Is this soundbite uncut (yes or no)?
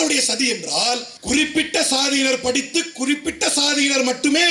no